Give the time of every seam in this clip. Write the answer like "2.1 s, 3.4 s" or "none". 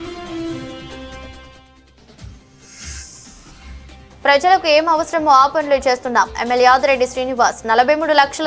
3.0 s